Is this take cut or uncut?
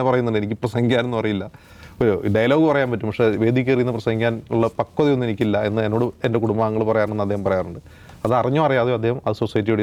uncut